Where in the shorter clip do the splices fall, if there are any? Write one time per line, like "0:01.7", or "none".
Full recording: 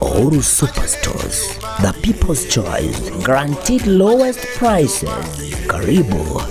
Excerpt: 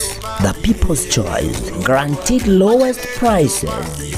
none